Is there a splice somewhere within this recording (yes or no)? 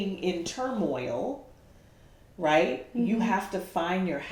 no